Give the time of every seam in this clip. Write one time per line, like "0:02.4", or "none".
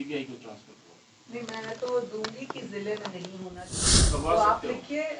0:04.0